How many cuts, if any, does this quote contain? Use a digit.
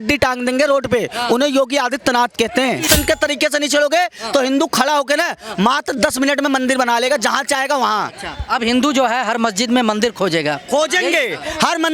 1